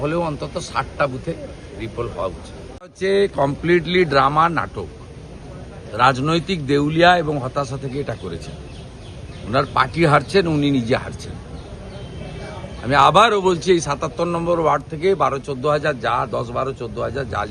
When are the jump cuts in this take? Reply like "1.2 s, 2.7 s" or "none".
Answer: 2.3 s